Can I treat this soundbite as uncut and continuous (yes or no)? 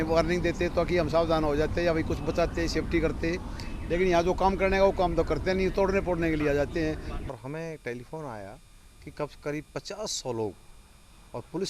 no